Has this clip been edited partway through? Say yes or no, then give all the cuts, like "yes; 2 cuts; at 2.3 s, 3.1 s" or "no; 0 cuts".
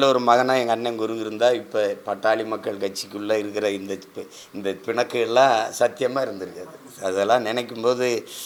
no; 0 cuts